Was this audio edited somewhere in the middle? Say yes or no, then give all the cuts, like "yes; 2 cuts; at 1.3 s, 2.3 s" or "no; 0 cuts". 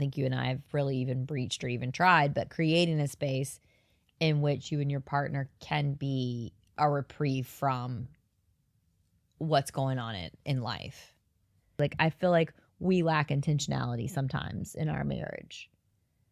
yes; 1 cut; at 11.8 s